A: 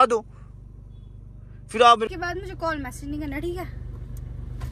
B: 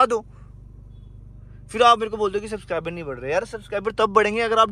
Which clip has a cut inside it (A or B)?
A